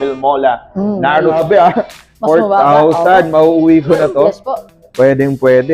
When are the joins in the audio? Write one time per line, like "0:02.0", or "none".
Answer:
0:01.4